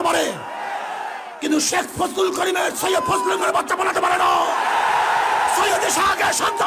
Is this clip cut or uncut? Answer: uncut